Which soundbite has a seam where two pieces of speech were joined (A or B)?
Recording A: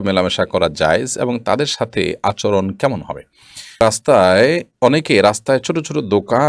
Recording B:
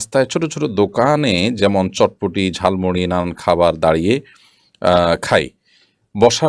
A